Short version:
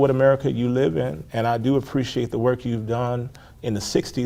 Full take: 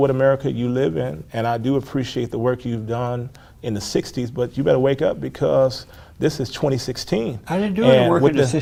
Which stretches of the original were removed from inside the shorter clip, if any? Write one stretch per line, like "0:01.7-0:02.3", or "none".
none